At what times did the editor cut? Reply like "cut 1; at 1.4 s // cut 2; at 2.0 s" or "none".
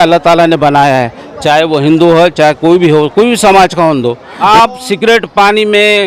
cut 1; at 4.3 s

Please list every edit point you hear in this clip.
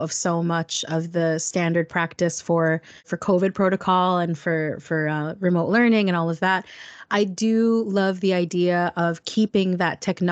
cut 1; at 3.1 s

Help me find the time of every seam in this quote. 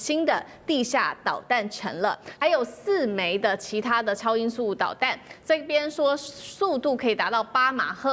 cut 1; at 2.3 s

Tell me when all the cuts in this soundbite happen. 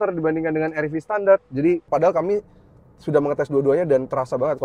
cut 1; at 1.9 s

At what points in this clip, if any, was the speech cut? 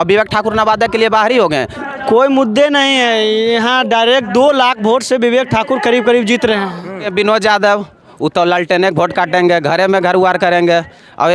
cut 1; at 1.8 s // cut 2; at 7.1 s

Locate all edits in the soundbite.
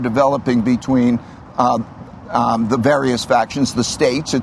none

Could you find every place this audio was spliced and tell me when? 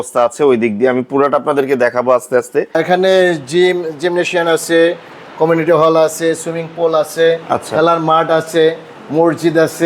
cut 1; at 2.8 s

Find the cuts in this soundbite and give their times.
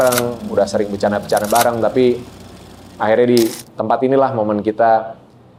none

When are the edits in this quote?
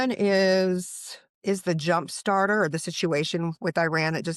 none

